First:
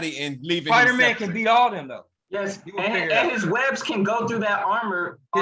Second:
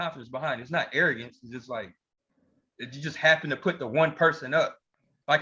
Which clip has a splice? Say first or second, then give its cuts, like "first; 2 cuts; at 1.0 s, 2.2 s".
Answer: first; 1 cut; at 2.2 s